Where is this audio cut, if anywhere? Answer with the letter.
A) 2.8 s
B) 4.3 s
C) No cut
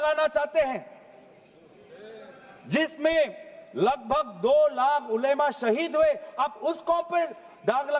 C